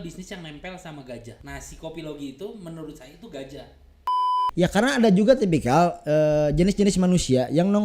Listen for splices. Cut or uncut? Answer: cut